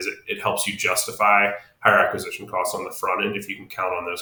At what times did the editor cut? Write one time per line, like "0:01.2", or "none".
none